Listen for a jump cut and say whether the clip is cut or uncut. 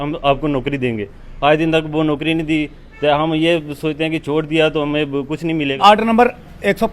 cut